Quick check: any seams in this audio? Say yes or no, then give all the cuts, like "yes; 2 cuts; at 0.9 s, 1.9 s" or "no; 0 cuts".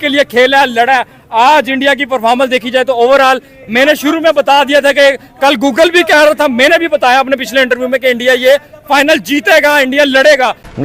no; 0 cuts